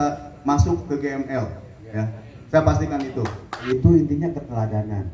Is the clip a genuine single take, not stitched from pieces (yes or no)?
no